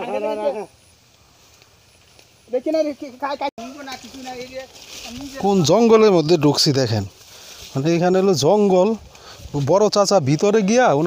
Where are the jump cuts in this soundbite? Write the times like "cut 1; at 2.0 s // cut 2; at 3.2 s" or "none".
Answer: cut 1; at 3.6 s